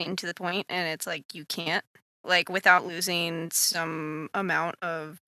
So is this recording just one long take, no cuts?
no; 1 cut; at 2.2 s

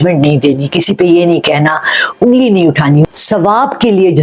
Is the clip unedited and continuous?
no; 1 cut; at 3.1 s

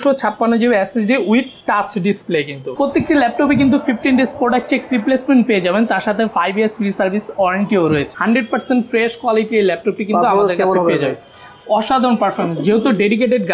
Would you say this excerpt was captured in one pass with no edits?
no; 2 cuts; at 2.6 s, 8.1 s

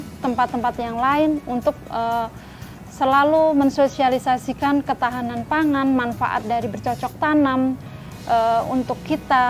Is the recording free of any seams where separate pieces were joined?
yes; 0 cuts

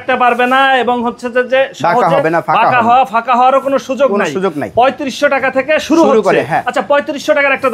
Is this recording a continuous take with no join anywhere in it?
yes; 0 cuts

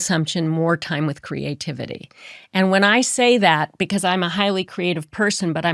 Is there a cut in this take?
no; 0 cuts

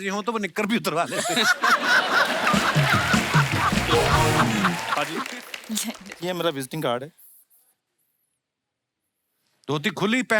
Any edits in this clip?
yes; 1 cut; at 5.0 s

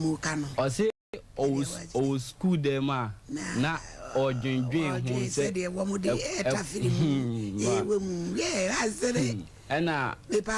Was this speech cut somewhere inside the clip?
no; 0 cuts

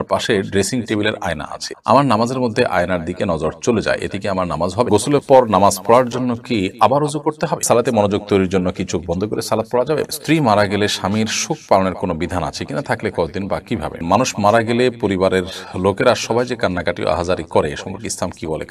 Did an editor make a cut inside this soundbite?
yes; 4 cuts; at 4.9 s, 7.6 s, 10.1 s, 14.0 s

